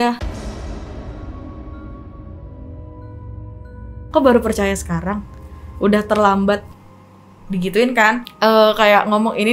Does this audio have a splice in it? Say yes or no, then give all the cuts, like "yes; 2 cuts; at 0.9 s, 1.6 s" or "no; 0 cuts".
yes; 1 cut; at 8.3 s